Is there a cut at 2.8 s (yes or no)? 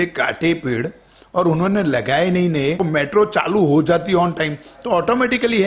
yes